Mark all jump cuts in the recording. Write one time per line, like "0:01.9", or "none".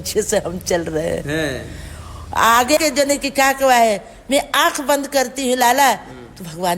0:02.8